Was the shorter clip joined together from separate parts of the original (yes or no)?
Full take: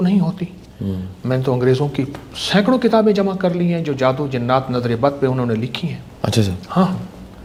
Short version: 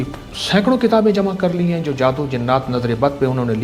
no